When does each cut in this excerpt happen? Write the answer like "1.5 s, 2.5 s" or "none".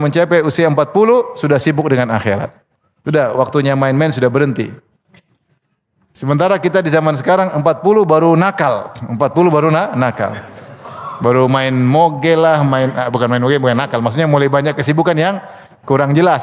none